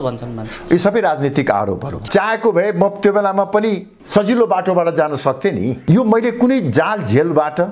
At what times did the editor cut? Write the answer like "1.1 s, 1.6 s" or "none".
1.9 s, 5.8 s